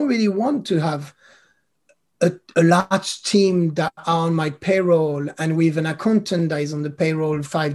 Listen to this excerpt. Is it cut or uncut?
uncut